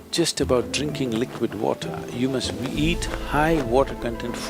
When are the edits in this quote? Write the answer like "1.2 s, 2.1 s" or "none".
none

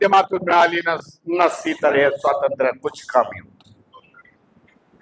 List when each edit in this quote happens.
none

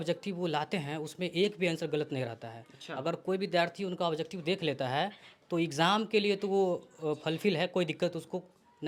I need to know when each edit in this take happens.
none

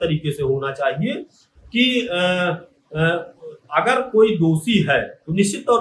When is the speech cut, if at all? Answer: none

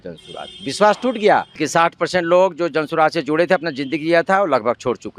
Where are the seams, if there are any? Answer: 1.6 s

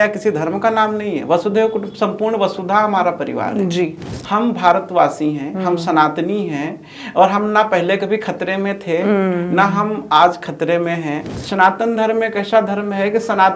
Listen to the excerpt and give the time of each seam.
4.0 s, 11.3 s

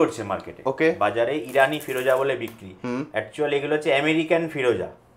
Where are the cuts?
none

